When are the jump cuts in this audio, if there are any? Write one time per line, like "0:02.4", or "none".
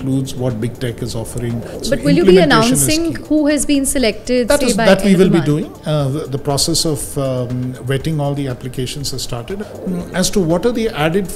0:01.8
0:09.7